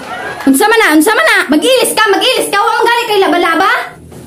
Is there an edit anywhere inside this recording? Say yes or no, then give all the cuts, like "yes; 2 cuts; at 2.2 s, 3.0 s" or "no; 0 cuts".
no; 0 cuts